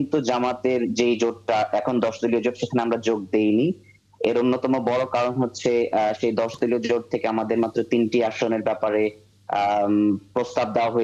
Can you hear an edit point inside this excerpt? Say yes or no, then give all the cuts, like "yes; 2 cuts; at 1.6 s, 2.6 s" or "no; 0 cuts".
no; 0 cuts